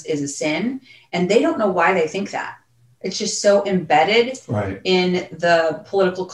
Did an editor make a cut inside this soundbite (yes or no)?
no